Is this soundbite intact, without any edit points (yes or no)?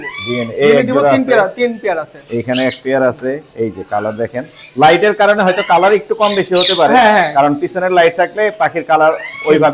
yes